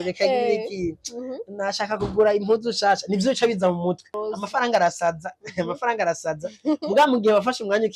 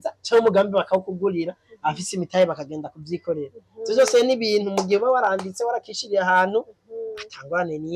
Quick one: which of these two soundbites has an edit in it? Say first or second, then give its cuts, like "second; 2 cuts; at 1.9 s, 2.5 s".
first; 1 cut; at 4.2 s